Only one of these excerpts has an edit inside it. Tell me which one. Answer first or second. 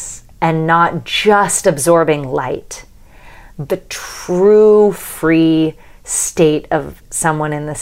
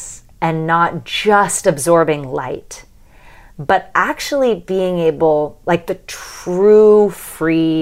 first